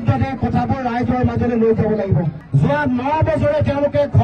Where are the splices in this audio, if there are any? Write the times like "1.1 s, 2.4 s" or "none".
2.4 s